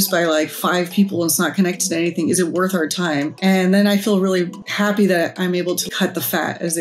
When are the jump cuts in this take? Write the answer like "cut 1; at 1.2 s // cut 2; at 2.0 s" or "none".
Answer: cut 1; at 3.3 s // cut 2; at 4.6 s // cut 3; at 5.9 s